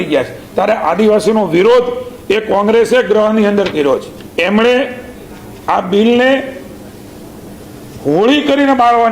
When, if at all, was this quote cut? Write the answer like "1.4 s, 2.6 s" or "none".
4.2 s